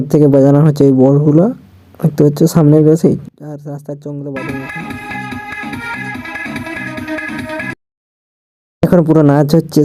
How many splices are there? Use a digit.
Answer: 0